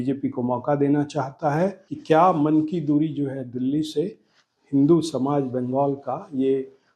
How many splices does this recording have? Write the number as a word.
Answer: one